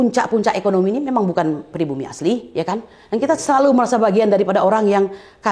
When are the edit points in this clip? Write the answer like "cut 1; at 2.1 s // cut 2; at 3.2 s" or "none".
none